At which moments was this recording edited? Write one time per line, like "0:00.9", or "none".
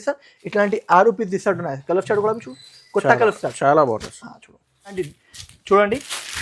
0:05.0